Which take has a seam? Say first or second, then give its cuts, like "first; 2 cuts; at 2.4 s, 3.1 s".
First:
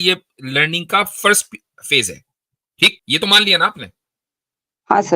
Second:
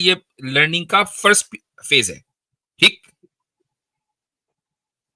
first; 1 cut; at 3.0 s